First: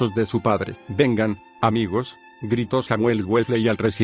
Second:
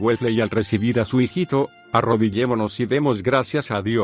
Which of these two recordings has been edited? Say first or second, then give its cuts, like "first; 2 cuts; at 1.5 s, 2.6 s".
first; 1 cut; at 2.2 s